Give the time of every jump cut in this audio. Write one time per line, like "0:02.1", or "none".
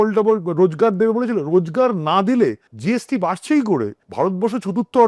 0:02.7
0:04.0